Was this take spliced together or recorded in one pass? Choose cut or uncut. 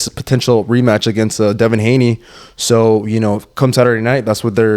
uncut